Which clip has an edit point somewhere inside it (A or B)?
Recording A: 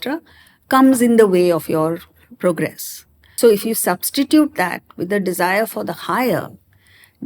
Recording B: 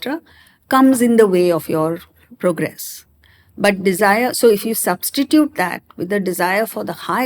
A